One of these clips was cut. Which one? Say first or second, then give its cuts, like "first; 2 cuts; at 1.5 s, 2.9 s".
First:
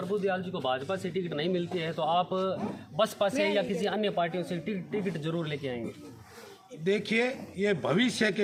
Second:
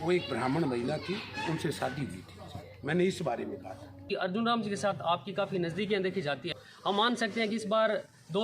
second; 2 cuts; at 4.1 s, 6.4 s